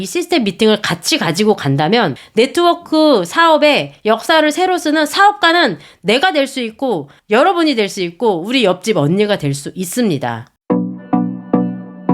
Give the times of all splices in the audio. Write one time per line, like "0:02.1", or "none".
0:02.2
0:07.1
0:10.5